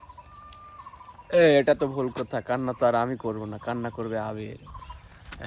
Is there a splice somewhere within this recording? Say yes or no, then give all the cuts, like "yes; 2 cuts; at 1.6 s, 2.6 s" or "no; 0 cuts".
no; 0 cuts